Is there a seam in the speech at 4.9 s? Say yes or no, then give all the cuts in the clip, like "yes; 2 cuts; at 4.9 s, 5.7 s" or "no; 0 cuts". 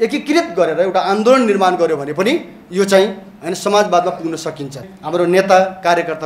yes; 1 cut; at 4.9 s